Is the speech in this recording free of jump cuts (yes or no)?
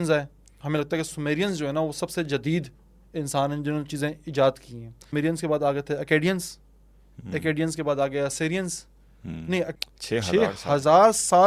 no